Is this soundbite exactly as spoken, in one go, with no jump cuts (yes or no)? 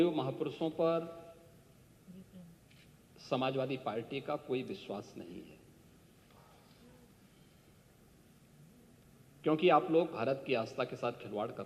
yes